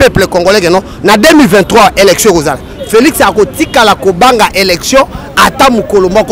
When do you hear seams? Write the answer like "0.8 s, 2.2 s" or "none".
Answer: none